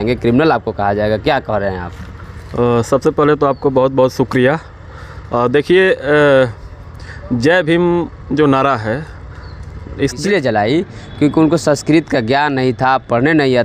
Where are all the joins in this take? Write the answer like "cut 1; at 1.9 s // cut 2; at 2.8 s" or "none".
cut 1; at 10.2 s